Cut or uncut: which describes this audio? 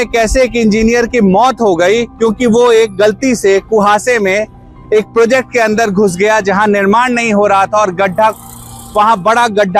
uncut